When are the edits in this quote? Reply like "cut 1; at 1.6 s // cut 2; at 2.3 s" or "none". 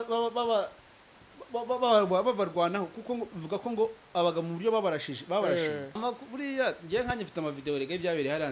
cut 1; at 6.0 s